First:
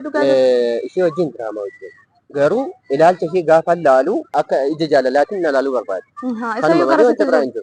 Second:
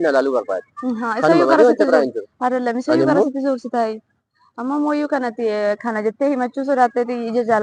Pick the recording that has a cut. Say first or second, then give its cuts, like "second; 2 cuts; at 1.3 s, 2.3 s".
first; 1 cut; at 4.2 s